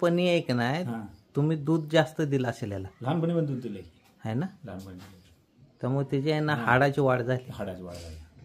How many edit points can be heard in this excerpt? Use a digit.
0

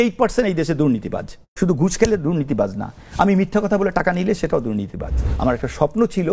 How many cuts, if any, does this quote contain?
2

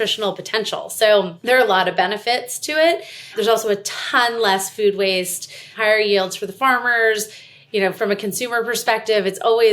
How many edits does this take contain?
3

